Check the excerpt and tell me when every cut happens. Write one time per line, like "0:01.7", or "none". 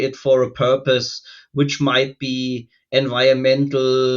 none